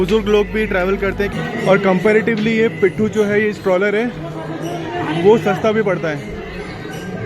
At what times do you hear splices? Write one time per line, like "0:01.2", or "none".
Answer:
0:01.3